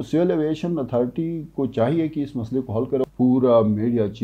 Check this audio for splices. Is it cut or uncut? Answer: cut